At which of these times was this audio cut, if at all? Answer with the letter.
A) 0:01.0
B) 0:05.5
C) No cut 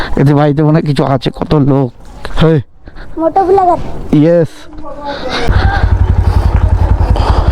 B